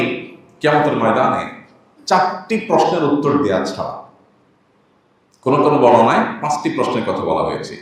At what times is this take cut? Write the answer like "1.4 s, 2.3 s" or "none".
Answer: none